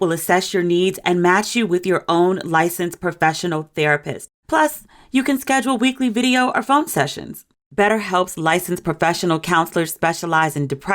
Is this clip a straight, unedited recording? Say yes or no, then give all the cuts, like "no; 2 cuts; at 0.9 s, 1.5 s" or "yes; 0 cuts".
no; 1 cut; at 4.4 s